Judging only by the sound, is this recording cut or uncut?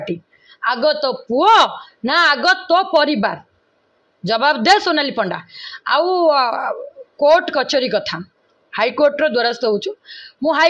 uncut